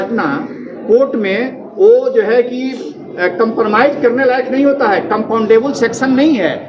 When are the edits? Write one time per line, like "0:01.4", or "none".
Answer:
none